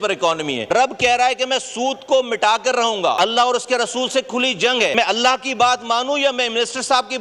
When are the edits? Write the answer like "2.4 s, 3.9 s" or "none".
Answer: 0.7 s, 3.2 s, 4.9 s